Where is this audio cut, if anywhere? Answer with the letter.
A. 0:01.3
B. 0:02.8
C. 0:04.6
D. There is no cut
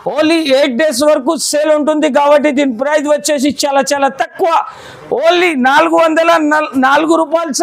D